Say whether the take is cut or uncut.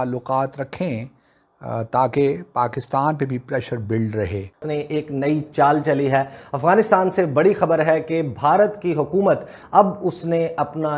cut